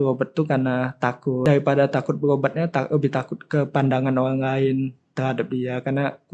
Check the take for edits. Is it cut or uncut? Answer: cut